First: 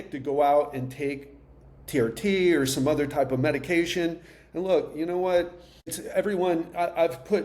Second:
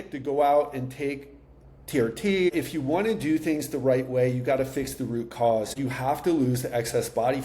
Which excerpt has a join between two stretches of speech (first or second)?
second